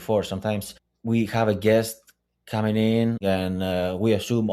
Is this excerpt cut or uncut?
cut